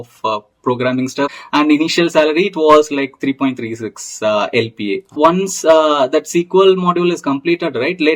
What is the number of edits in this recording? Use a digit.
2